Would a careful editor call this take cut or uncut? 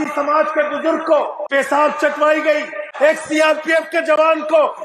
cut